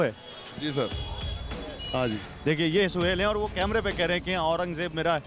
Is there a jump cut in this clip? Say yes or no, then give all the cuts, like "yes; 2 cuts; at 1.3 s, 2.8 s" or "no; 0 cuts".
no; 0 cuts